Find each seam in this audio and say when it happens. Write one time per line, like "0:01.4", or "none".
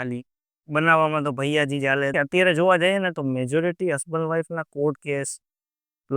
0:02.1